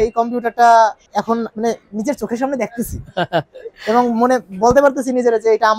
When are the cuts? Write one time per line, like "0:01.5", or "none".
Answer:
0:01.3